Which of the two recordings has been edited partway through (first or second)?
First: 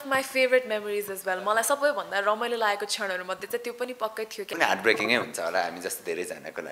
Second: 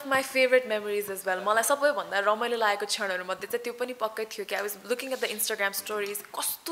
first